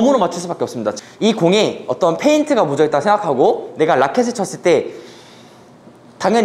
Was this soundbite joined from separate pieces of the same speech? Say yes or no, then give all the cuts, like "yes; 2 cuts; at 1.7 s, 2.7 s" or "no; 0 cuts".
yes; 1 cut; at 1.0 s